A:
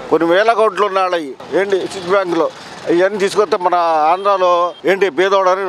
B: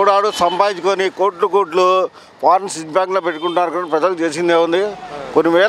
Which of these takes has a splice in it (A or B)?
A